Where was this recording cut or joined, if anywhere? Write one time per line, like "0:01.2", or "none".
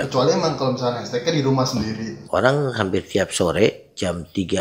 0:02.1